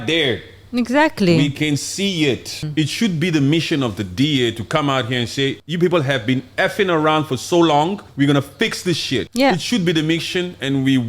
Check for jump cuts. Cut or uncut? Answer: cut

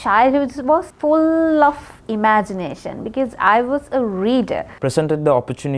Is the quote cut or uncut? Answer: cut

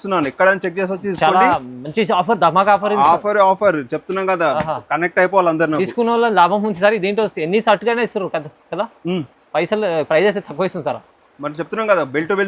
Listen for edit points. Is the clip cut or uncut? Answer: uncut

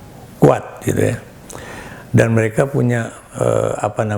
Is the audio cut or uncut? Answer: uncut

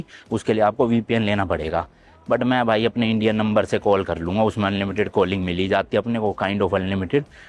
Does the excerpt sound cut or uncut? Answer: uncut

